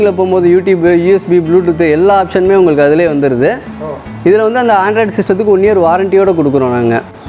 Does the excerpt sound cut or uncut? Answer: uncut